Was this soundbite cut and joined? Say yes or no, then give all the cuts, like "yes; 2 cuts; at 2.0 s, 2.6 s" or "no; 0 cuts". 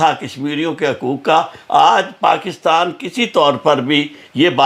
no; 0 cuts